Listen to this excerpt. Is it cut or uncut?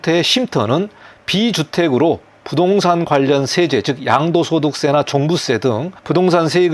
uncut